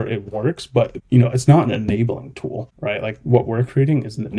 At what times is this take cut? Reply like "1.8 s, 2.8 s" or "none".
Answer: 1.0 s, 2.7 s